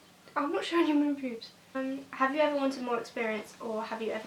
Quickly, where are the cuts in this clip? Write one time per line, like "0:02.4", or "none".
0:01.7

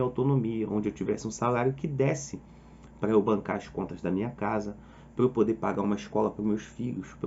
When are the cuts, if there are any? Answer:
none

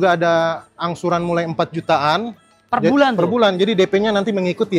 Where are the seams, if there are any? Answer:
none

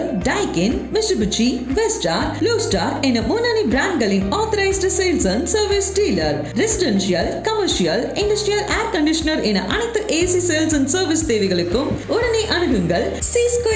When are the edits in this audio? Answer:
none

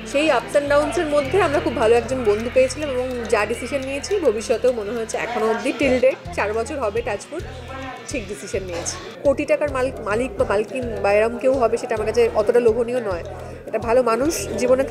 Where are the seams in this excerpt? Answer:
0:09.0

